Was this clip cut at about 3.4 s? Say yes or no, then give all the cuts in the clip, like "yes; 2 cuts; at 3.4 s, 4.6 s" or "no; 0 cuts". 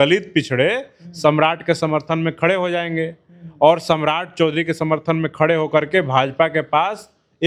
no; 0 cuts